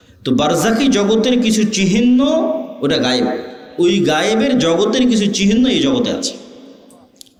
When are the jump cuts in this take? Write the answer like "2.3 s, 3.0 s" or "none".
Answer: none